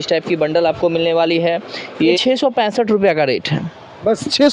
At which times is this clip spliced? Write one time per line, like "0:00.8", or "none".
0:02.2